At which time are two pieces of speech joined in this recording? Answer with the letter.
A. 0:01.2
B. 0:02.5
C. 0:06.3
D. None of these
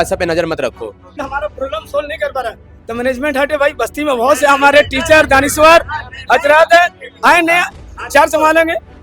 A